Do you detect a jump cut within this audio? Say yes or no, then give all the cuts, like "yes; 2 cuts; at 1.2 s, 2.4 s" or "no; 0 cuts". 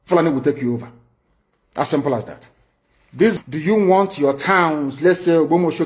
yes; 1 cut; at 3.4 s